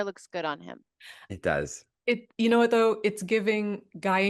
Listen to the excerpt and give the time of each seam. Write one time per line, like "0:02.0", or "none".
none